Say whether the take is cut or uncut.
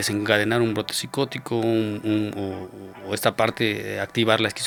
uncut